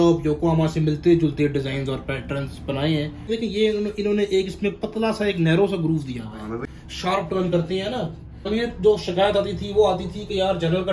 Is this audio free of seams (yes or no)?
no